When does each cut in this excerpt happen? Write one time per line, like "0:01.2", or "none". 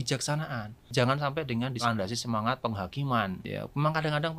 0:00.9
0:01.8
0:03.4